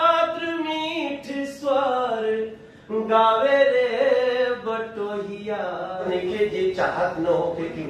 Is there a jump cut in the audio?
yes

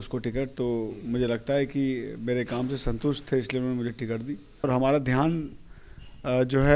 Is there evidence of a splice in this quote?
yes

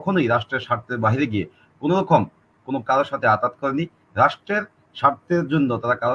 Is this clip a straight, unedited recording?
yes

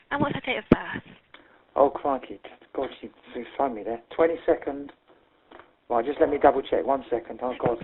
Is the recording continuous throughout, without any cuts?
yes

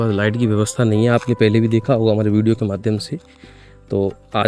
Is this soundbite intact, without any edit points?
yes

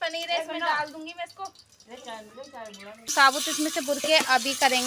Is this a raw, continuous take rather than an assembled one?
no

